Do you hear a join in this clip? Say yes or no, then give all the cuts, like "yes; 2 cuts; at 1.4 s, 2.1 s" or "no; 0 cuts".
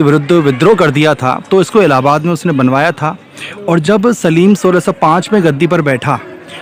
no; 0 cuts